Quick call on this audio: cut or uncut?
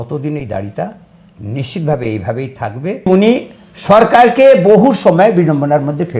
cut